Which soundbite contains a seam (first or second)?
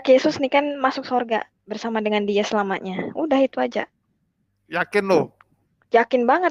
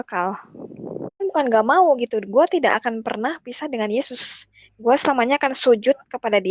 second